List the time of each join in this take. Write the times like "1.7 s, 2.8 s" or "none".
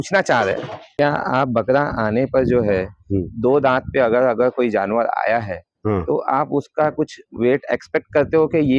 0.9 s